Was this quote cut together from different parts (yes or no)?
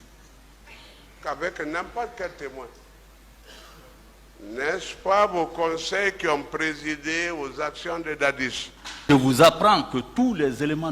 yes